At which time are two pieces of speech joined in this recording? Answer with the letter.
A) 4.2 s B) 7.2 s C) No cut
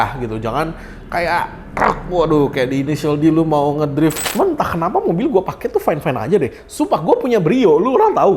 A